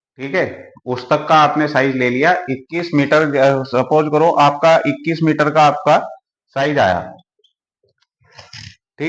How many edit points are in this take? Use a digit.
0